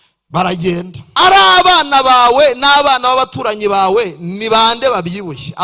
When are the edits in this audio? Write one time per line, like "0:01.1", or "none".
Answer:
0:01.1